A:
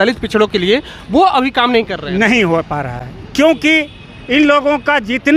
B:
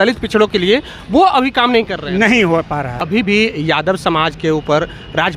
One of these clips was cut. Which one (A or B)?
B